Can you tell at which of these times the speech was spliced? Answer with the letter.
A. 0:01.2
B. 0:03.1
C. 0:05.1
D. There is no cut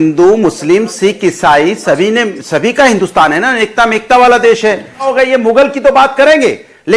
C